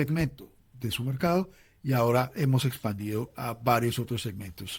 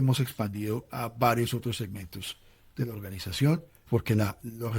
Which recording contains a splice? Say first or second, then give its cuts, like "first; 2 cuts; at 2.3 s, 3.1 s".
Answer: second; 1 cut; at 3.9 s